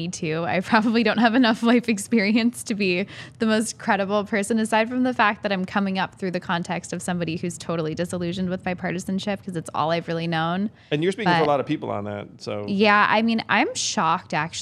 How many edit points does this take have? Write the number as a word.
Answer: zero